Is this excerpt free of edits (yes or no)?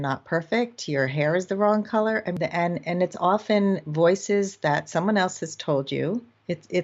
no